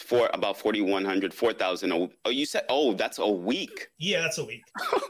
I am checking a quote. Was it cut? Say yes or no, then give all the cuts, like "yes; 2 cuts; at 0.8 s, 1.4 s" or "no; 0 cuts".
no; 0 cuts